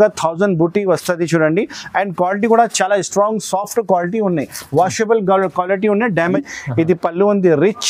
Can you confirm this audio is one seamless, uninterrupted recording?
no; 1 cut; at 6.3 s

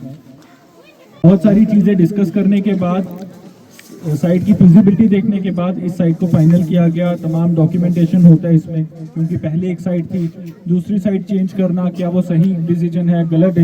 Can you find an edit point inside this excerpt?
yes; 1 cut; at 1.2 s

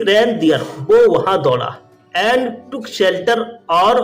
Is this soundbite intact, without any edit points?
no; 1 cut; at 1.9 s

